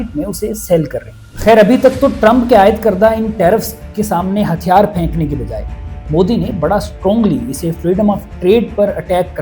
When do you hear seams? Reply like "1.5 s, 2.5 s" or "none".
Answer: 1.2 s